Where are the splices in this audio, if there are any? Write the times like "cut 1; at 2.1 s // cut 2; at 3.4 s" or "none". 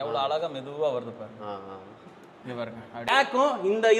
cut 1; at 3.1 s